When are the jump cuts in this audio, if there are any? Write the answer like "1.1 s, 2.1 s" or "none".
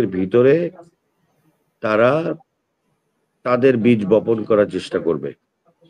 none